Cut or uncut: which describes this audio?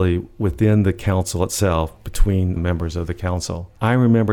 cut